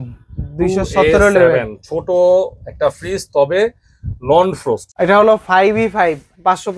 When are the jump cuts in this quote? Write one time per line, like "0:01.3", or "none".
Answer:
0:04.9